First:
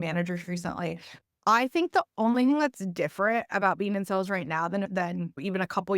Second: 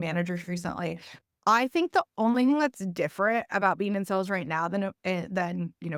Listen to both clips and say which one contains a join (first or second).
first